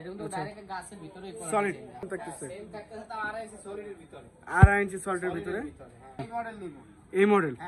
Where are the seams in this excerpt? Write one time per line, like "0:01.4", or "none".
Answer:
0:02.0
0:06.2

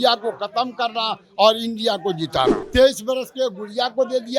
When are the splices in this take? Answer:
0:02.6

